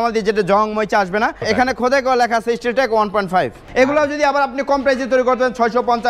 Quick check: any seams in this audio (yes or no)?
yes